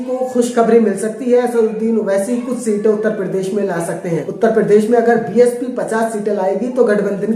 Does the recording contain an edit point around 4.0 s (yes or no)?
yes